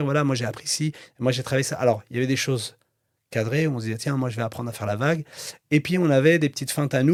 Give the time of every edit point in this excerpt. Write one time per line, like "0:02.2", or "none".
none